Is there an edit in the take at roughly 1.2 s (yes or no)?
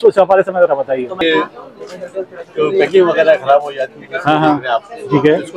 yes